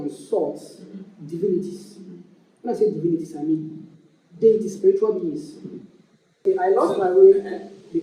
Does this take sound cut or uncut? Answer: cut